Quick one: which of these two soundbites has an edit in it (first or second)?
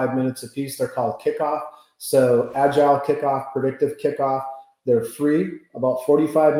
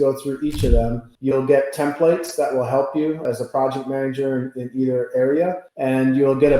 second